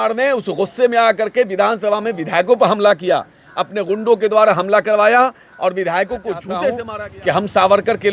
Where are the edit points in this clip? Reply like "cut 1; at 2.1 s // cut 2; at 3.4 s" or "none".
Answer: cut 1; at 6.9 s